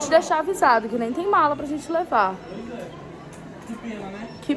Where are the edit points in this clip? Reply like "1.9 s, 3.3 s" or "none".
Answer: none